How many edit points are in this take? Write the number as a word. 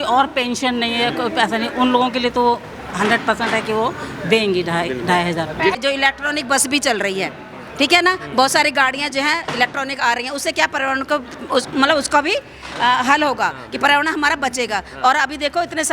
one